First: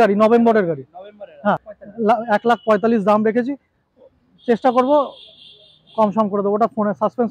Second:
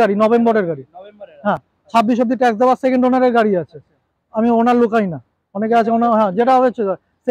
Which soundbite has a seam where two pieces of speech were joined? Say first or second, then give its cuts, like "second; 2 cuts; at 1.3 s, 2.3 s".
first; 1 cut; at 1.7 s